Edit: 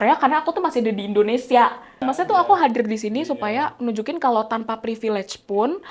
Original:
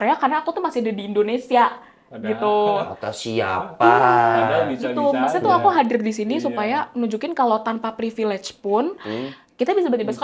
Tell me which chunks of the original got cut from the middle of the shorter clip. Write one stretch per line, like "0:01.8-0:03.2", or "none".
0:02.1-0:05.3